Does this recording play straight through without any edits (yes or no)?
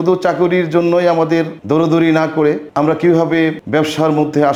yes